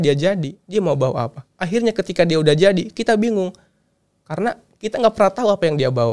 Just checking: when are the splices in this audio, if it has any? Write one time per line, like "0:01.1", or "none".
none